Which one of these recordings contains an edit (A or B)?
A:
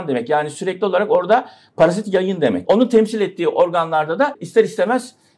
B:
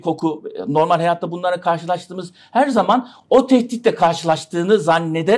A